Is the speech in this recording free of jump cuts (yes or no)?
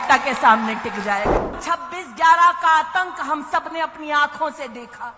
no